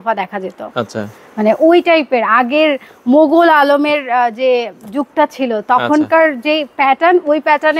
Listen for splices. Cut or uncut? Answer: uncut